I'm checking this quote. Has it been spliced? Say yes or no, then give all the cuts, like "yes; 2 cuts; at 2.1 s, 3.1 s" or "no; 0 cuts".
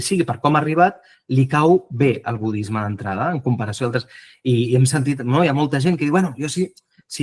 no; 0 cuts